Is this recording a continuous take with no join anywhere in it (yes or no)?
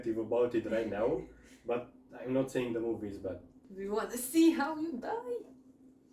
no